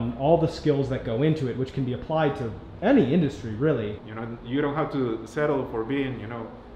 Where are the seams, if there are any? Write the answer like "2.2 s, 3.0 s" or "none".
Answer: 3.9 s